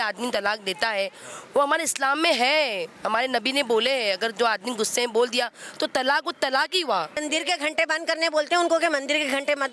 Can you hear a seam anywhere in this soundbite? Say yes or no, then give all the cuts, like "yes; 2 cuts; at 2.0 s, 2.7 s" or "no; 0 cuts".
yes; 1 cut; at 7.2 s